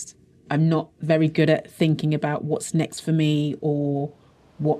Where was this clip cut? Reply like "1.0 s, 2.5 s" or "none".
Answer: none